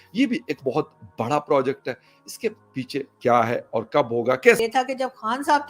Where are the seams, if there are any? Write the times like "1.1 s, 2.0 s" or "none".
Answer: 4.6 s

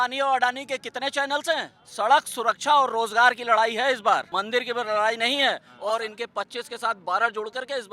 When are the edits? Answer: 1.8 s, 4.3 s, 5.7 s

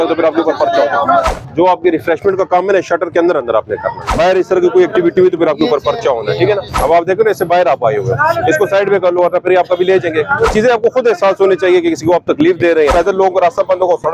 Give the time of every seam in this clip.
1.2 s, 4.0 s, 6.8 s, 10.5 s, 12.9 s

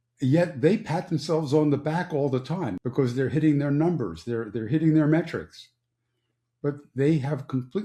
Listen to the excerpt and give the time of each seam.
2.7 s

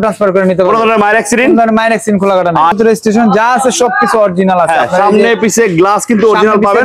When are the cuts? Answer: 2.7 s

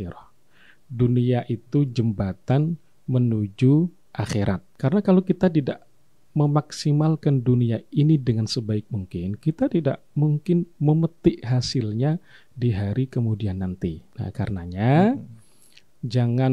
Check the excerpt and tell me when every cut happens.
4.7 s, 14.1 s

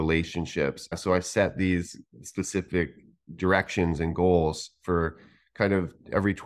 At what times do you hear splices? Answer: 0.9 s

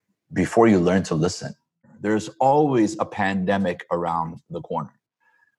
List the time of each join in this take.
1.9 s

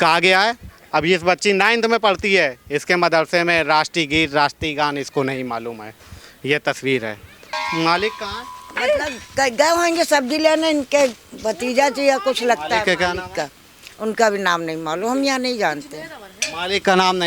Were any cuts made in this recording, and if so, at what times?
7.6 s

